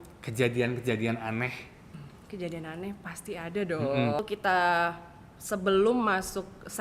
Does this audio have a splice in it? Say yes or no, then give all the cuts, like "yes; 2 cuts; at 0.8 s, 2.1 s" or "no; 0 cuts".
yes; 2 cuts; at 2.1 s, 4.2 s